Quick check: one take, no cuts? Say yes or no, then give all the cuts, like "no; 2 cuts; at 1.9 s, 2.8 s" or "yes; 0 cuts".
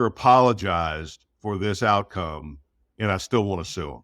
yes; 0 cuts